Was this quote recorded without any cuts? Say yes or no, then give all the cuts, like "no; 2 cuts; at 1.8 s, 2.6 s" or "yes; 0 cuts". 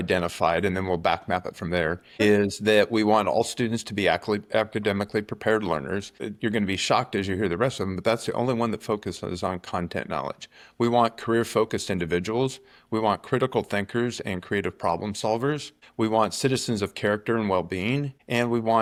yes; 0 cuts